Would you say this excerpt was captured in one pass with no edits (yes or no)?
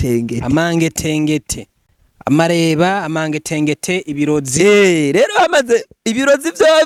yes